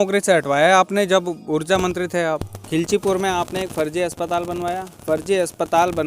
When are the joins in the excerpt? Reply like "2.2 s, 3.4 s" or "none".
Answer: 2.5 s